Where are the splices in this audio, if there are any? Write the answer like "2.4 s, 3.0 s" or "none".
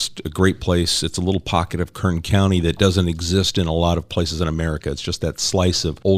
none